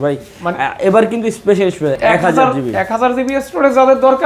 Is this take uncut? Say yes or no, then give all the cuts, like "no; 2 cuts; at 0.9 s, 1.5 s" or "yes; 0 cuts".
no; 1 cut; at 2.0 s